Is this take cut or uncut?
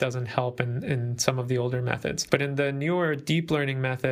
cut